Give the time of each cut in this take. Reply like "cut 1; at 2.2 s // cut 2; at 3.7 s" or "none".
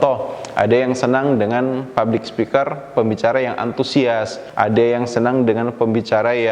cut 1; at 4.4 s